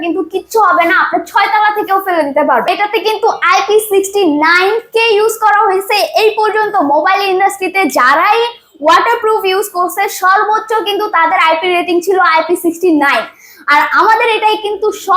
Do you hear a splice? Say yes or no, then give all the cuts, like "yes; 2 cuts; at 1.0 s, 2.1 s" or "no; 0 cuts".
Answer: yes; 1 cut; at 2.7 s